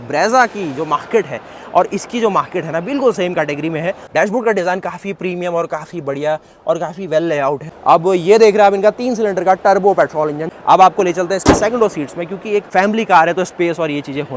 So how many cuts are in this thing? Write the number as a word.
four